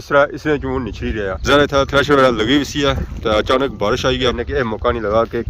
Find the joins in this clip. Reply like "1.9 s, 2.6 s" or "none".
1.4 s, 4.4 s